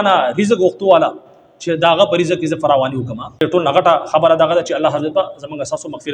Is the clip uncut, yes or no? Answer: no